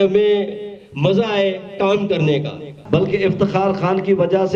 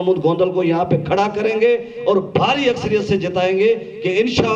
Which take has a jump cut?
first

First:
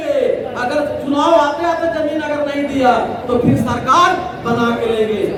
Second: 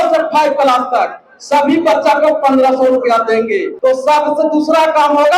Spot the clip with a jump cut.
second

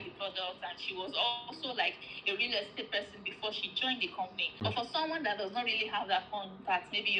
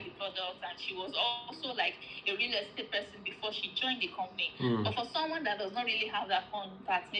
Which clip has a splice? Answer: first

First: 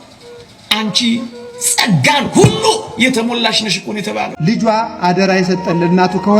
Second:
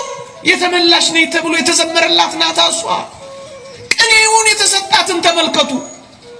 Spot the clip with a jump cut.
first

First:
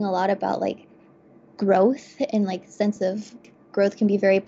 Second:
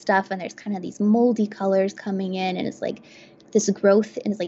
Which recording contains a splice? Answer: first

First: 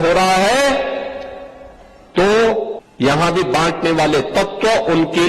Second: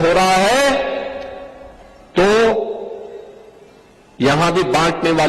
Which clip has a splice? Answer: first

